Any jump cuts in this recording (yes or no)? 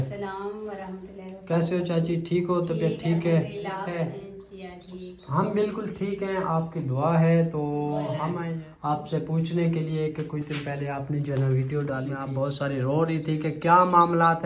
yes